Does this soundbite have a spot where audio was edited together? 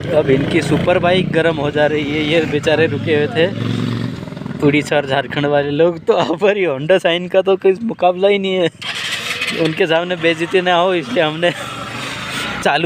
no; 0 cuts

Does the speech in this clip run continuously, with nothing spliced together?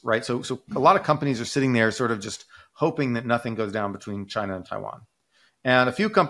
yes; 0 cuts

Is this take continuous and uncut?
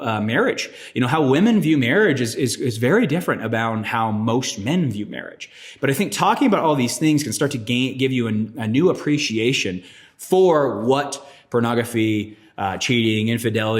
yes; 0 cuts

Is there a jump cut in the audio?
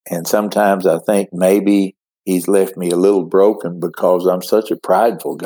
no; 0 cuts

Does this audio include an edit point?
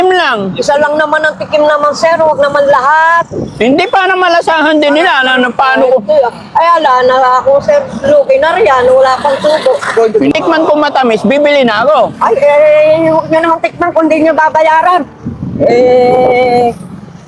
yes; 1 cut; at 10.3 s

